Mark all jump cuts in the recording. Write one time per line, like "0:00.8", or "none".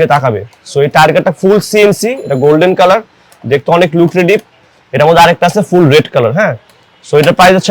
none